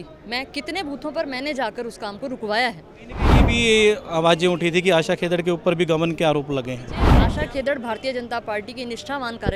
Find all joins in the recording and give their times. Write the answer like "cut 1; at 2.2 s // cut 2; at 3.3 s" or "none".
cut 1; at 3.5 s // cut 2; at 7.2 s

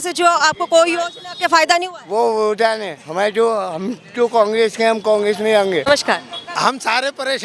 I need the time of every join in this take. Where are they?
cut 1; at 5.8 s

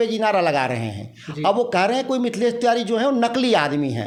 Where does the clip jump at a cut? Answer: none

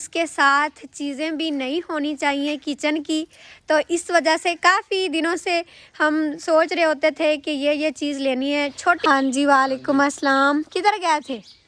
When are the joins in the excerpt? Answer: cut 1; at 9.0 s

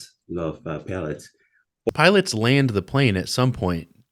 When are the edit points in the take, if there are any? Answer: none

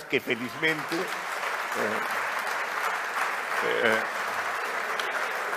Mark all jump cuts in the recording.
none

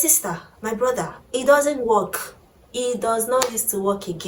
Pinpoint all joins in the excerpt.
none

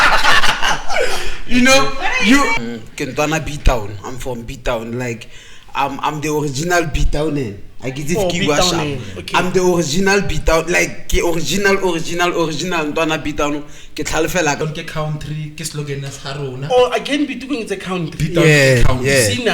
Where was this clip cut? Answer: cut 1; at 2.6 s // cut 2; at 14.6 s

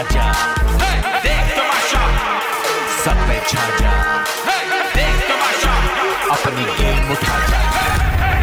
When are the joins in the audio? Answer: none

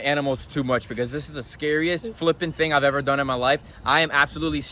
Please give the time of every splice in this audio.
none

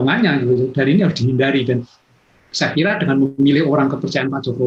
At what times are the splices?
none

